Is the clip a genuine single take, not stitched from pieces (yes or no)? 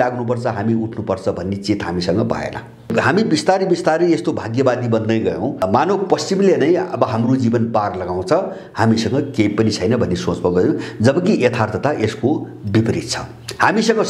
no